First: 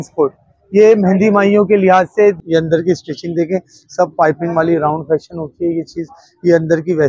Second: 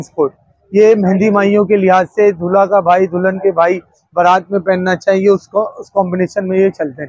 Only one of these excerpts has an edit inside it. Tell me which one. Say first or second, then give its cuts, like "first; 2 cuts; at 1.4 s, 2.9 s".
first; 1 cut; at 2.4 s